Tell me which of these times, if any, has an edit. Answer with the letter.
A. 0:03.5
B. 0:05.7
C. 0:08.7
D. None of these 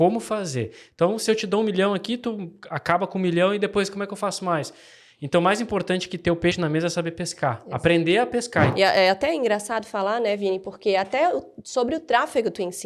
C